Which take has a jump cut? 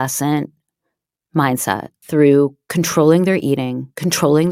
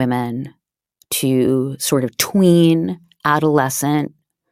first; 1 cut; at 1.9 s

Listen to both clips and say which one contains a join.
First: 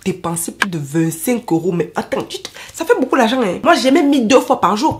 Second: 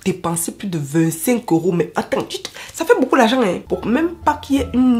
first; 1 cut; at 3.6 s

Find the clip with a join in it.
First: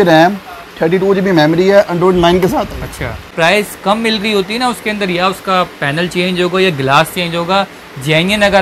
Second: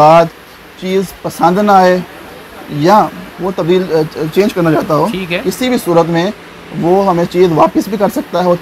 first; 1 cut; at 3.2 s

